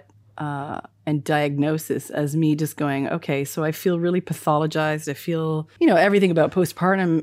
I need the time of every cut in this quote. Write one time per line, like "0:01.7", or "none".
0:05.7